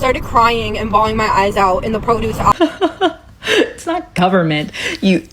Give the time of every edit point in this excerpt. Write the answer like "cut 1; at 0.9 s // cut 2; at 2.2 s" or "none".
cut 1; at 2.5 s